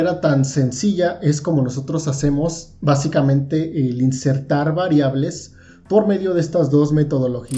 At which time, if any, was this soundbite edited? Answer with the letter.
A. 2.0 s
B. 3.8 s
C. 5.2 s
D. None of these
D